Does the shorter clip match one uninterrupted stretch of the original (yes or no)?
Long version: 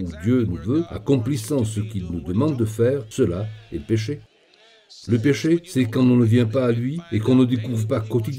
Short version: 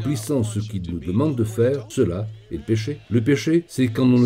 no